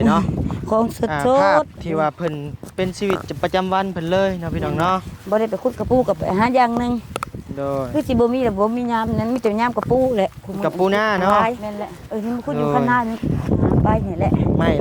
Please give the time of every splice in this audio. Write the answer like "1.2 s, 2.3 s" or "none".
13.2 s